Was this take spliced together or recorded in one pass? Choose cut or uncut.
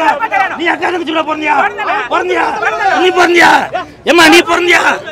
uncut